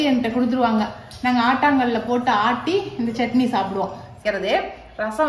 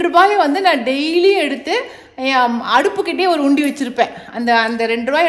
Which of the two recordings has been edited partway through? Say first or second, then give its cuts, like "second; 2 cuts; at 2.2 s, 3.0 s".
first; 1 cut; at 4.2 s